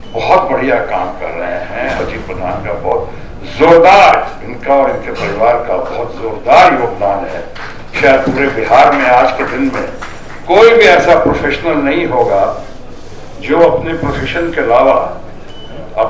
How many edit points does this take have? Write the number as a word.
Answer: one